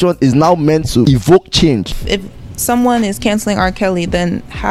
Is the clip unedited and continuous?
no; 2 cuts; at 1.1 s, 1.9 s

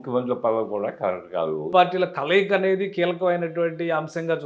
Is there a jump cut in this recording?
yes; 1 cut; at 1.7 s

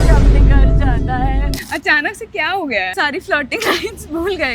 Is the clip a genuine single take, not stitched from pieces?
no; 2 cuts; at 1.6 s, 2.9 s

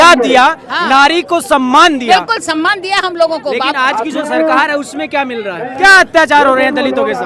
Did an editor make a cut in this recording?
yes; 1 cut; at 5.7 s

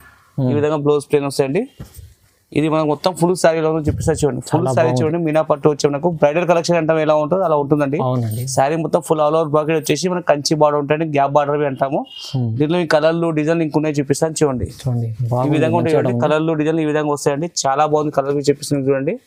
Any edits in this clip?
no; 0 cuts

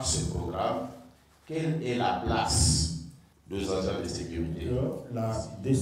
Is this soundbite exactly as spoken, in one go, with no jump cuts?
no; 1 cut; at 4.7 s

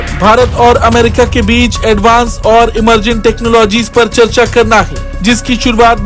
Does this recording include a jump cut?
no; 0 cuts

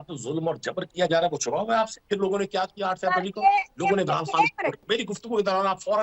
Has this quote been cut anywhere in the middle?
yes; 3 cuts; at 0.9 s, 2.0 s, 4.8 s

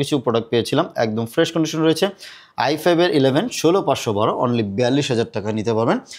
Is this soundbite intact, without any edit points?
yes; 0 cuts

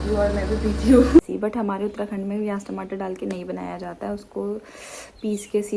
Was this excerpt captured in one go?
no; 1 cut; at 1.2 s

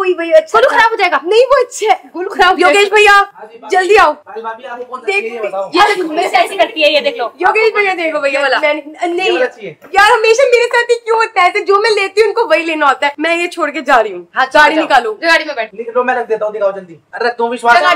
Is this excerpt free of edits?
yes; 0 cuts

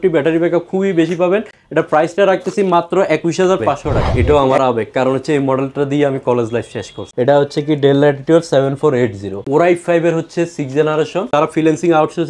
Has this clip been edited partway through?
yes; 4 cuts; at 4.1 s, 6.9 s, 9.4 s, 11.3 s

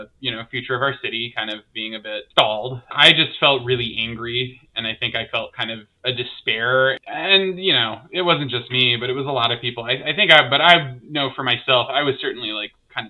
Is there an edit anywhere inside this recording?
yes; 1 cut; at 2.9 s

